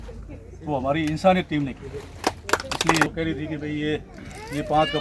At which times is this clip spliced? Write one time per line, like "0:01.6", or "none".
0:03.1